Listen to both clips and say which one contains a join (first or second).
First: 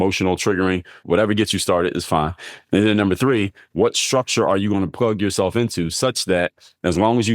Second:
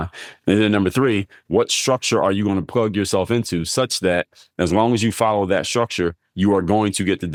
first